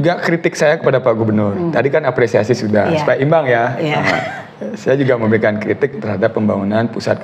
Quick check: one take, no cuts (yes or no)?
yes